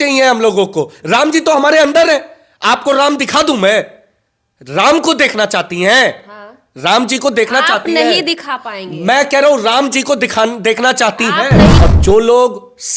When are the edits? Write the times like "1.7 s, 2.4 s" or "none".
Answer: 11.8 s

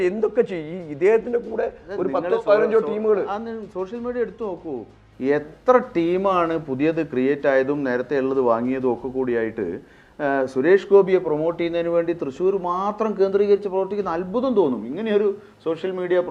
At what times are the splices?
none

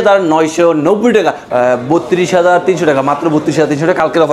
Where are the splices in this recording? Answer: 1.4 s

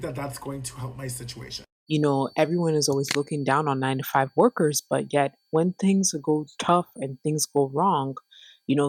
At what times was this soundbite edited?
1.8 s

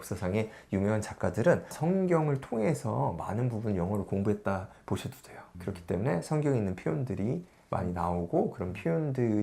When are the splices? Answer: none

